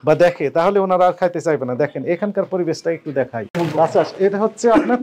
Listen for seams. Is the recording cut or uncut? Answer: cut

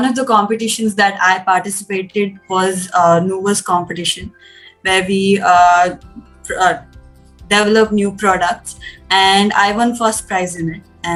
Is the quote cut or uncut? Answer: uncut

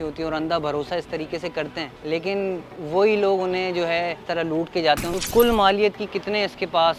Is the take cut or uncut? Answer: cut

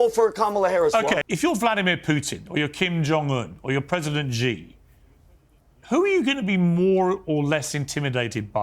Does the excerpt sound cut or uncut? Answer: cut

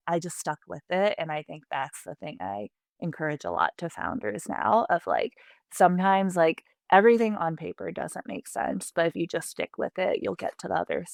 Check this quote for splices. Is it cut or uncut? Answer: uncut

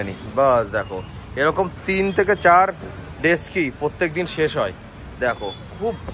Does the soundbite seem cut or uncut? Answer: uncut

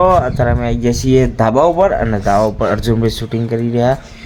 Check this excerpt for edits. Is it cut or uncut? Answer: uncut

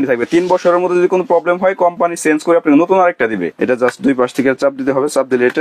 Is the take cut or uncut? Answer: cut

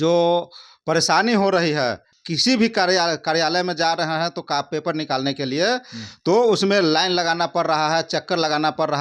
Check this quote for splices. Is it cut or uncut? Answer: cut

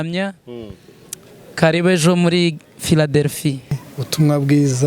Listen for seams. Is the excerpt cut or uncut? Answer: cut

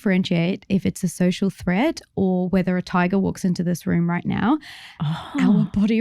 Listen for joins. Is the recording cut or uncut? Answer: uncut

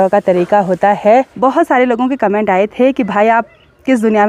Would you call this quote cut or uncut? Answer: cut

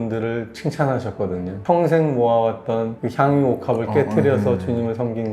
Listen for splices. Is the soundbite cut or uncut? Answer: cut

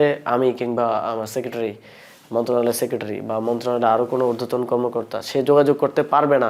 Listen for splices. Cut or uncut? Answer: uncut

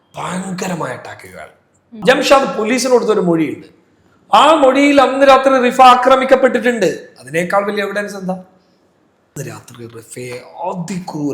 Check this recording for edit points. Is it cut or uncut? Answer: cut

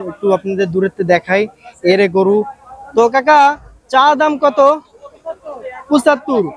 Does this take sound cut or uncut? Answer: uncut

